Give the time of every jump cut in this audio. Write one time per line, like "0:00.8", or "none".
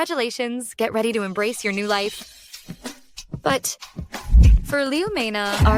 none